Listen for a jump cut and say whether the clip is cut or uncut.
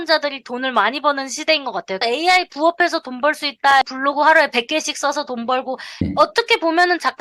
cut